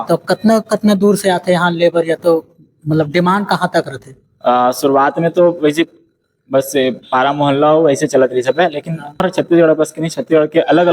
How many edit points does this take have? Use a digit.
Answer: 1